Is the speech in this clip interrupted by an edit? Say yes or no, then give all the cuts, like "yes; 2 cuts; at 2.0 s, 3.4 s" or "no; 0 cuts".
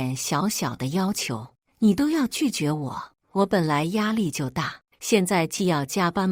no; 0 cuts